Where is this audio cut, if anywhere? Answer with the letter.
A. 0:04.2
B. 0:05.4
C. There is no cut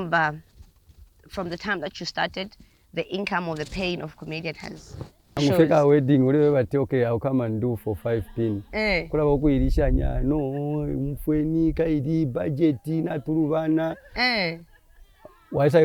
B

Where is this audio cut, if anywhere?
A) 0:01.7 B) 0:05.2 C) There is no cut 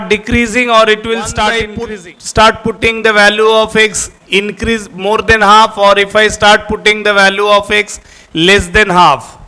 A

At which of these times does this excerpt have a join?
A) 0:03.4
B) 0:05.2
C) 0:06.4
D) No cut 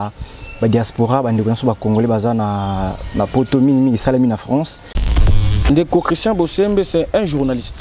B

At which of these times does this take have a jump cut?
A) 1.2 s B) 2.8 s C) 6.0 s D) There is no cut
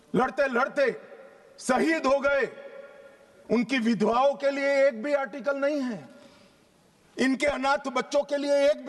D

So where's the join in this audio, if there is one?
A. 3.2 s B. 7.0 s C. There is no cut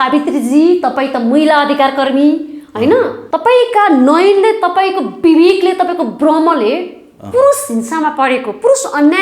A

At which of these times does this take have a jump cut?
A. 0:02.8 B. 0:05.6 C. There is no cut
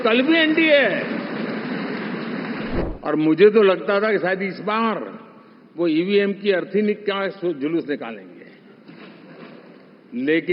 A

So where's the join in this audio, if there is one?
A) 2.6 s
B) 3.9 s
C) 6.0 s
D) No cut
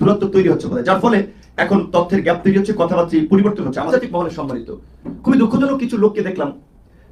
B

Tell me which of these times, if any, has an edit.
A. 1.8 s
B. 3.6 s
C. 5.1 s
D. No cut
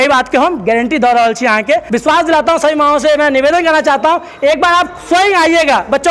A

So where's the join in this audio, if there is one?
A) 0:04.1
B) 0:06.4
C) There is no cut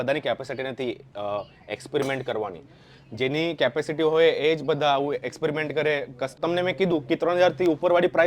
B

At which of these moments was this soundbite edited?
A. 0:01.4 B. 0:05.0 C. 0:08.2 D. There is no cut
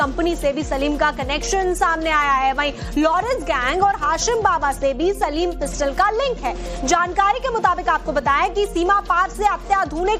B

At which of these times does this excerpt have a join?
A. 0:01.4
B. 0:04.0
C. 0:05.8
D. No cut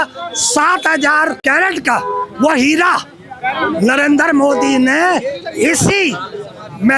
A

